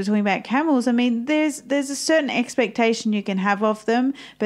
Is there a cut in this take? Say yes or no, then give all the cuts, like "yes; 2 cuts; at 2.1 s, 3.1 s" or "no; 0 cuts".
no; 0 cuts